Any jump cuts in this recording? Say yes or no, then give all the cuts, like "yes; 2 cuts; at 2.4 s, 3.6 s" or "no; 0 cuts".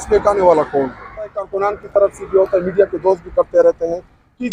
yes; 1 cut; at 1.4 s